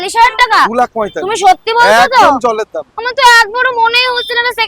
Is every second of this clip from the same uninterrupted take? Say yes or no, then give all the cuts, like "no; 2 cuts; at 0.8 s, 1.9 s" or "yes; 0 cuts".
yes; 0 cuts